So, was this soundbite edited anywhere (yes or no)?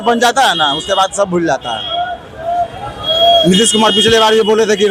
no